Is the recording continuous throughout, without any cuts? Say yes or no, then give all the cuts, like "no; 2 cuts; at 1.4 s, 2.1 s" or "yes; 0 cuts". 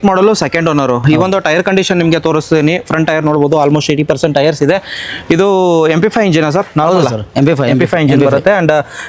yes; 0 cuts